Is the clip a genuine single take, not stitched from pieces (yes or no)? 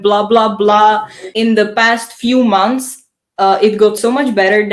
no